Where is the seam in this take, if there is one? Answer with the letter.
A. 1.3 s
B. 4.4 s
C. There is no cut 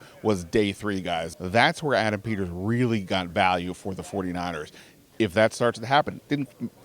A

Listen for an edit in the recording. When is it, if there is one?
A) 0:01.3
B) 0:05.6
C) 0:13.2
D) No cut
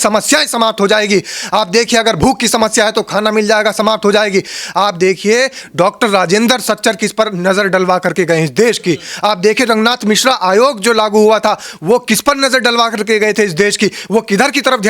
D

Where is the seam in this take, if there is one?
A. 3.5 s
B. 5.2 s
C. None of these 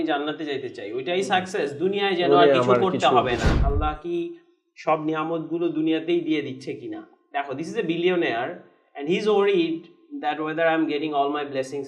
A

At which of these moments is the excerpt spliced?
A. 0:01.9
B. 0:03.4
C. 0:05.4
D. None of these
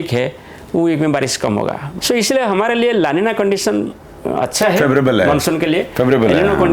A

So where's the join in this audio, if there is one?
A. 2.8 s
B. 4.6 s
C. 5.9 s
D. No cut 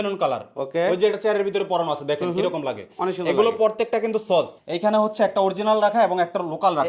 B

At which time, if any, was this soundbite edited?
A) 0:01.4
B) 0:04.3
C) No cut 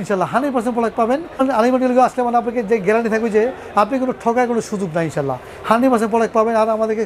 A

